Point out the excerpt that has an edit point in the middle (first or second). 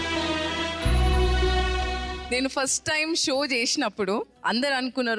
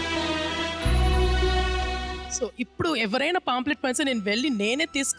first